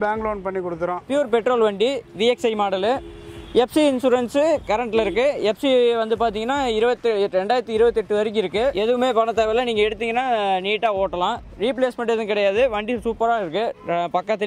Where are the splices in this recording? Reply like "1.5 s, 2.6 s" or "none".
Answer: 1.0 s, 8.8 s